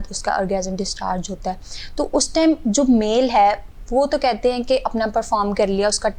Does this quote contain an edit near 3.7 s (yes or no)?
no